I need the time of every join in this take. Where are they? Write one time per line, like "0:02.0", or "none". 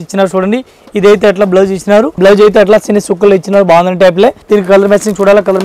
0:02.1
0:04.4